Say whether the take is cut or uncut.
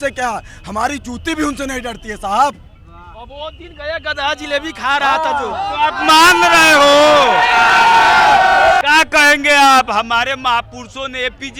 uncut